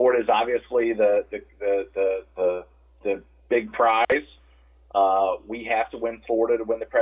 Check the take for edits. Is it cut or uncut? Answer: uncut